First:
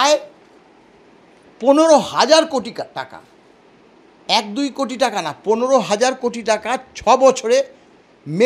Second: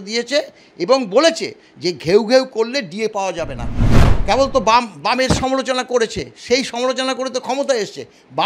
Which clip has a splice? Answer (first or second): second